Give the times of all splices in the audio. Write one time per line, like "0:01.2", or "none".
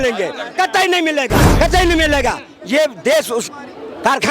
0:01.4